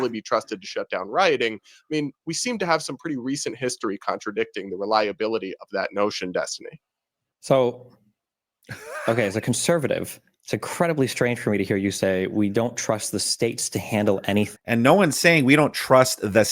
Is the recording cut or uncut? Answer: cut